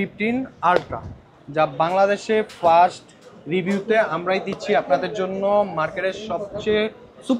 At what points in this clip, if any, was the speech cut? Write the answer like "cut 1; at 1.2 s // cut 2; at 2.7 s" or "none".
none